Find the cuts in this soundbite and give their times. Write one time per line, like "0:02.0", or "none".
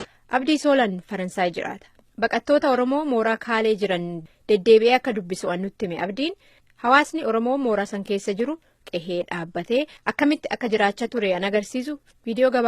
0:06.6